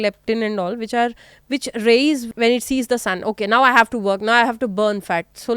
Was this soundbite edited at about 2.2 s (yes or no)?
yes